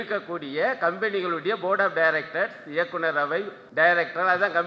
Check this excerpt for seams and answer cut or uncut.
cut